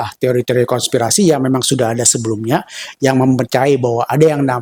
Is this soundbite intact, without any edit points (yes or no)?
yes